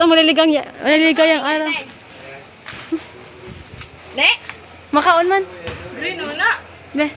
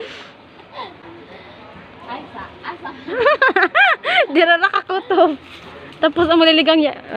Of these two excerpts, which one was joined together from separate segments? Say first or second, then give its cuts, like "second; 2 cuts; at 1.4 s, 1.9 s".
second; 1 cut; at 1.0 s